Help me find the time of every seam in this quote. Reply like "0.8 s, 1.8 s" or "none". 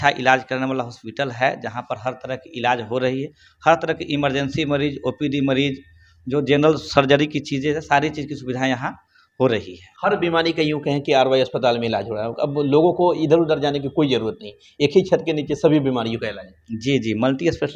none